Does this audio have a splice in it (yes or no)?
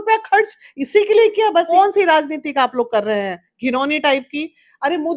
yes